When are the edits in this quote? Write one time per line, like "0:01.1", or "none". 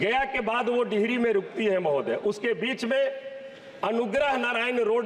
none